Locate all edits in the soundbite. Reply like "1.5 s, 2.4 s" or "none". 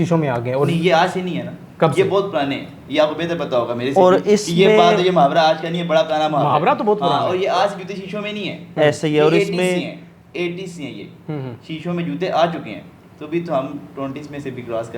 none